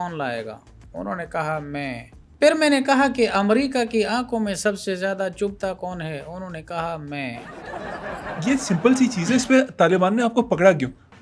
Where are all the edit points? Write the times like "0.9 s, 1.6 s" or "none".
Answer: 7.9 s